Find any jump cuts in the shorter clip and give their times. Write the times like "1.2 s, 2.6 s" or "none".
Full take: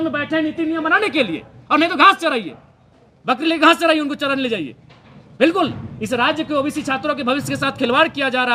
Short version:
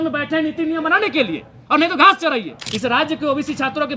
2.6 s